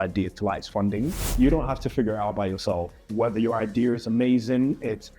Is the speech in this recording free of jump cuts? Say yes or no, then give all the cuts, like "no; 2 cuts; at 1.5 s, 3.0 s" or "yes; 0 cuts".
no; 1 cut; at 1.2 s